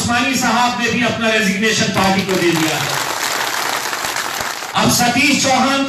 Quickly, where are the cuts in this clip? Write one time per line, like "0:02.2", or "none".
0:04.6